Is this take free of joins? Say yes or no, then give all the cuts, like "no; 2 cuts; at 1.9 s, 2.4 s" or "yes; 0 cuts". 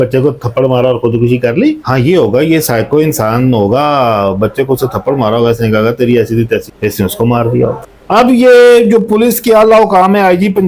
yes; 0 cuts